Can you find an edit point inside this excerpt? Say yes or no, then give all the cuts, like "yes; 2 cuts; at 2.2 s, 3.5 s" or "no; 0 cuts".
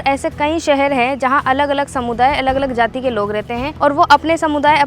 yes; 1 cut; at 3.7 s